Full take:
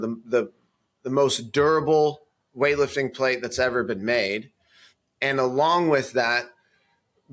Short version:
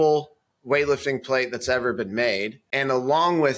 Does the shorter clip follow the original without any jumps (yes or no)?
no